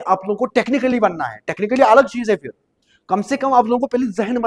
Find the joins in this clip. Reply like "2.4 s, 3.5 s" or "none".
none